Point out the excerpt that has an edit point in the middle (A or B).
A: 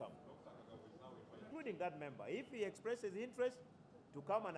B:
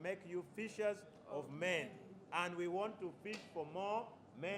A